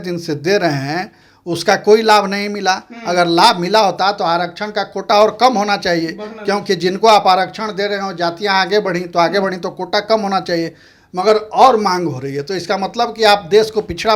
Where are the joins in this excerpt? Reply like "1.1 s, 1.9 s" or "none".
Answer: none